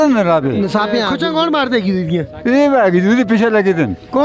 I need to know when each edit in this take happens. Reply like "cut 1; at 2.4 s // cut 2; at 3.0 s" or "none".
cut 1; at 1.1 s